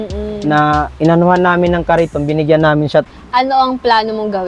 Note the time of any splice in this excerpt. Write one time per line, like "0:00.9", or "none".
0:03.1

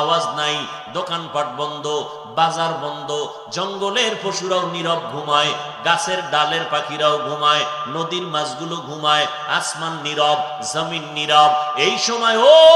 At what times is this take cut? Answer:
none

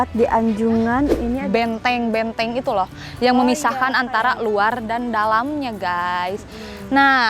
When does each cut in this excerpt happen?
0:01.3

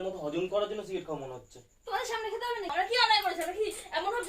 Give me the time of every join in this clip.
0:02.9

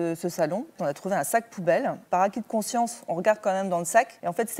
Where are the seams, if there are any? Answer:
0:00.8
0:02.0

